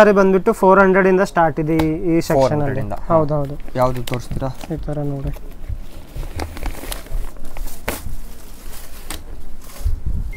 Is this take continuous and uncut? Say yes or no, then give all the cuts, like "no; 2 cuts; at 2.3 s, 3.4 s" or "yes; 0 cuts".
yes; 0 cuts